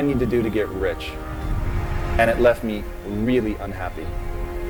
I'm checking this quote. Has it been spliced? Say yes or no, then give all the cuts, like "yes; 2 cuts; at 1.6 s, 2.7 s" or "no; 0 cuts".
no; 0 cuts